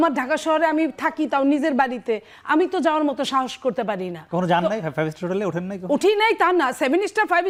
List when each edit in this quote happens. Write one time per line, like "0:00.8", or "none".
none